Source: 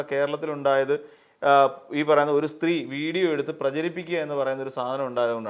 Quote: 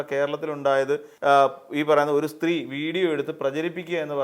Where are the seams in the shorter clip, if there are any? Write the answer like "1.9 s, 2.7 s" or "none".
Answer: 1.1 s